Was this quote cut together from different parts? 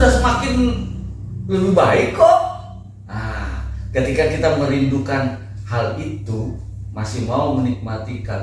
no; 0 cuts

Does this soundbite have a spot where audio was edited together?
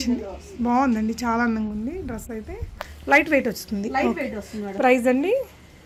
no; 0 cuts

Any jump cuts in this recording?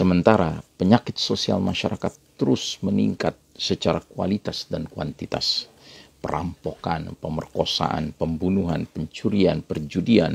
no; 0 cuts

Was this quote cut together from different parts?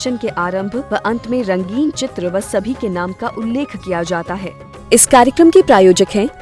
yes; 1 cut; at 4.5 s

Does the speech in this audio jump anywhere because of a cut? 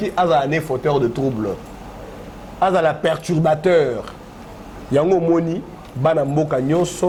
no; 0 cuts

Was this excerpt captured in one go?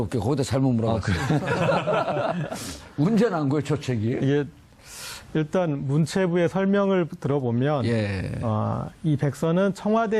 yes; 0 cuts

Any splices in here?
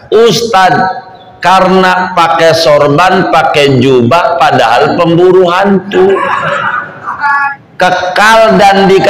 yes; 1 cut; at 7.6 s

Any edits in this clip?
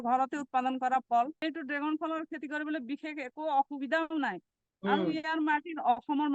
yes; 1 cut; at 1.4 s

